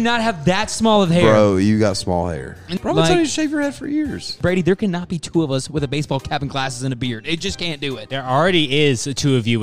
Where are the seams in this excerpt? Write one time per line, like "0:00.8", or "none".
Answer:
0:02.6
0:04.3
0:08.0